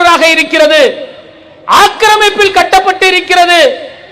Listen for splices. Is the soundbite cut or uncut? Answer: uncut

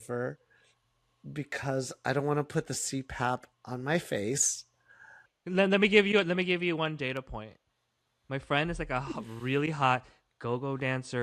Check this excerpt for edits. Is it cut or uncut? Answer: cut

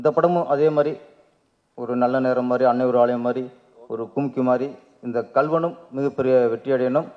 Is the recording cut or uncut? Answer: uncut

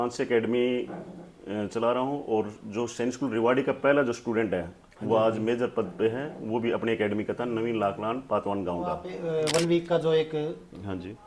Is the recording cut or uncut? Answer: cut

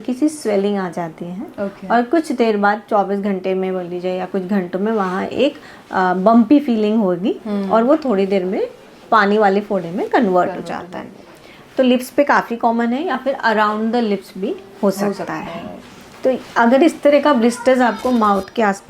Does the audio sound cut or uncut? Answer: uncut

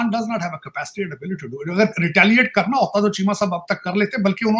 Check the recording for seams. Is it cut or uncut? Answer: uncut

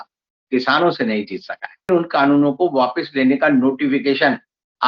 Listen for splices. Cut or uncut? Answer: cut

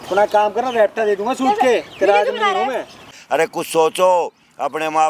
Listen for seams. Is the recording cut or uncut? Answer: cut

